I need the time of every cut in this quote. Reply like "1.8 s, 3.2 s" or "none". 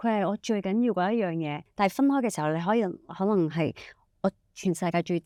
none